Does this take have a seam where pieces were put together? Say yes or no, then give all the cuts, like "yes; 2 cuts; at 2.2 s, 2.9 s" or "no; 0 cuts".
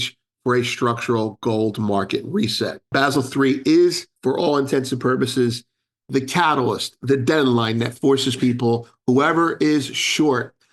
yes; 2 cuts; at 2.9 s, 4.1 s